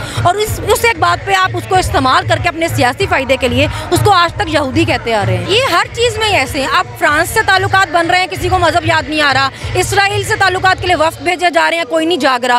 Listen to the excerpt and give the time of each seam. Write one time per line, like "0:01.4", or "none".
0:05.4